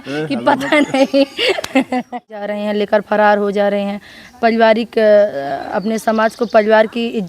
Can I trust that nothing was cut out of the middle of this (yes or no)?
no